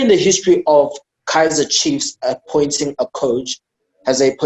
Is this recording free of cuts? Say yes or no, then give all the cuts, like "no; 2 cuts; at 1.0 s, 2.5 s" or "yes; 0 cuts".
yes; 0 cuts